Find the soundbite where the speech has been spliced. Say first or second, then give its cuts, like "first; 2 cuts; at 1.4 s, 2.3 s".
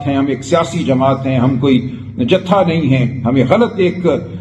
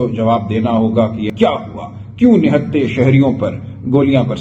second; 1 cut; at 1.3 s